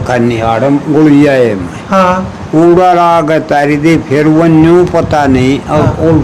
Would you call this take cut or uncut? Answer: uncut